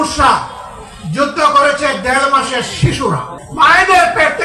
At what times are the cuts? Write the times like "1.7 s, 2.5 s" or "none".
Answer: 3.4 s